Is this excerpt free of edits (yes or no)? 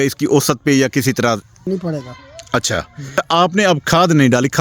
no